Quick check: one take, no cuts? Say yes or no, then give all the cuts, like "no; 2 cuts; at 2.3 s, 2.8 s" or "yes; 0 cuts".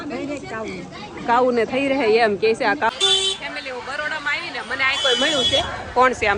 no; 1 cut; at 2.9 s